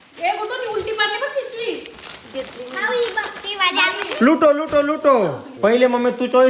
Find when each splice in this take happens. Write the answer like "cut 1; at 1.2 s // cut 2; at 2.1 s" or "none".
cut 1; at 5.4 s

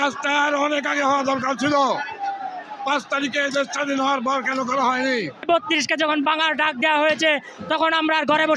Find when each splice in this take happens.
cut 1; at 5.4 s

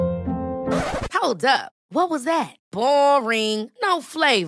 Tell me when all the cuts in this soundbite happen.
none

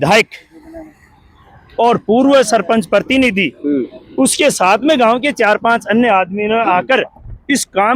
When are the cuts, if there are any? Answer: none

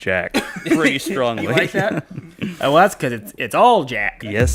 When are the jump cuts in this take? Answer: none

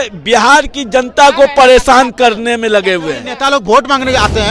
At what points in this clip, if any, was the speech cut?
cut 1; at 3.3 s

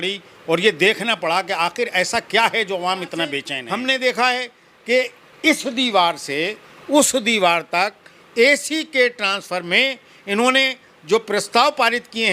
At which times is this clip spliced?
cut 1; at 3.5 s

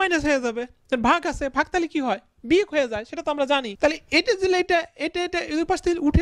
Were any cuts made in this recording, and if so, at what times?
cut 1; at 3.7 s

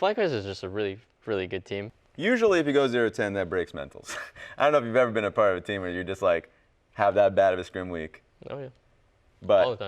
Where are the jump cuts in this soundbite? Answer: cut 1; at 2.0 s

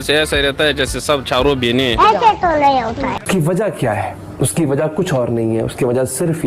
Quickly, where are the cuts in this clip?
cut 1; at 3.2 s

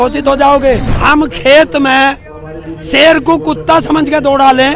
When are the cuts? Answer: cut 1; at 0.9 s

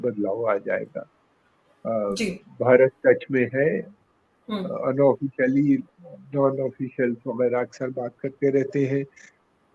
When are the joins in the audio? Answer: none

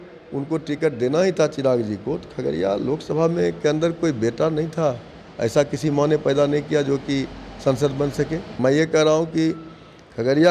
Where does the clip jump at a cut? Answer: cut 1; at 8.6 s

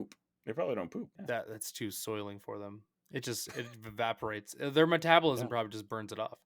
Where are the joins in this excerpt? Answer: cut 1; at 1.2 s

